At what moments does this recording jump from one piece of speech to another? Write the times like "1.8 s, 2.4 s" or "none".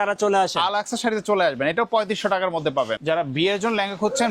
2.9 s